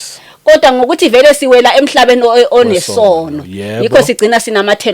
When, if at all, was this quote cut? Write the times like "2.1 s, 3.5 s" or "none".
none